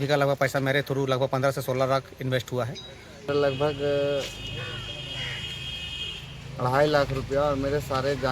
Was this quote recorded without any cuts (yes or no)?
no